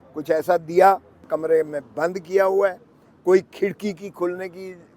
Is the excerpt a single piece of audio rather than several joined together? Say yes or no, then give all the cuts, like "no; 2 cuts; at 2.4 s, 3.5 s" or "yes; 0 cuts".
no; 1 cut; at 1.2 s